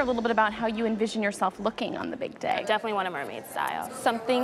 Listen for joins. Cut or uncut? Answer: uncut